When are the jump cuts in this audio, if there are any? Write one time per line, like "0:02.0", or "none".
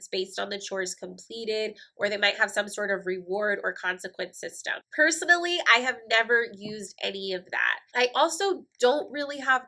0:07.8